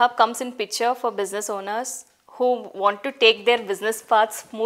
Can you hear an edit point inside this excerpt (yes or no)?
no